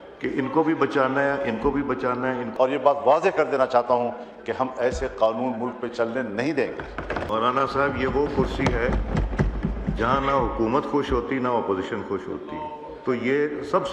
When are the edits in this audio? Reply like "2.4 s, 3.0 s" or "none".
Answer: 2.5 s, 7.3 s

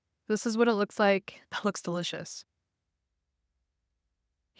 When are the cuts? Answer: 1.4 s

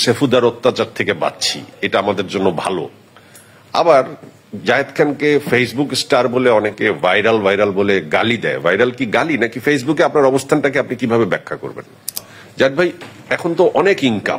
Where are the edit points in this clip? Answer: 12.3 s

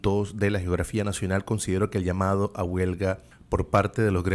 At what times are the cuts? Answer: 3.3 s

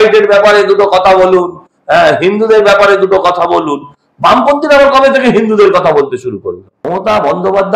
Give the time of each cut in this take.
6.7 s

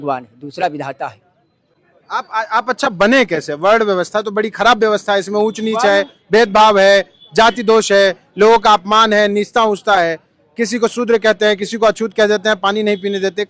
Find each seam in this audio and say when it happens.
none

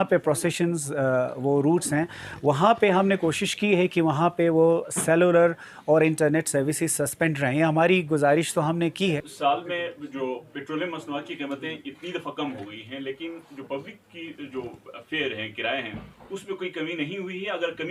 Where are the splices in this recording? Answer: 9.2 s

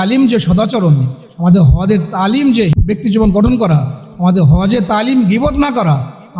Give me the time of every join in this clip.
2.7 s

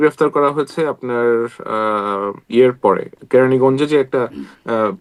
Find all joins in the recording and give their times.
none

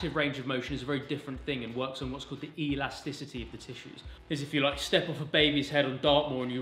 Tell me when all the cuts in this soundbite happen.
4.0 s

